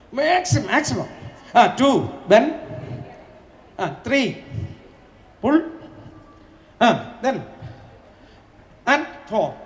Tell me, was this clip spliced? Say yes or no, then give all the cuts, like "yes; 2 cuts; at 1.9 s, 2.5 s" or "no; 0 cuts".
no; 0 cuts